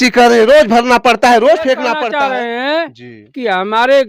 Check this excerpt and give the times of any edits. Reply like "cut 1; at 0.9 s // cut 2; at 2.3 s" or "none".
cut 1; at 1.9 s